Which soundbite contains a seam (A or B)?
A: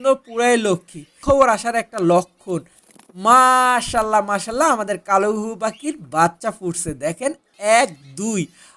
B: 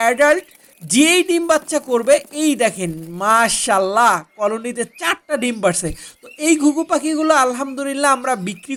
A